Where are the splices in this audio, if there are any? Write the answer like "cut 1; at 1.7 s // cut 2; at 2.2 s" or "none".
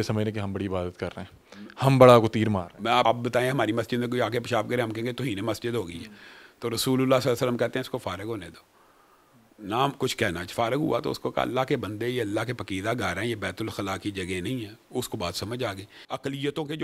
cut 1; at 3.0 s // cut 2; at 15.9 s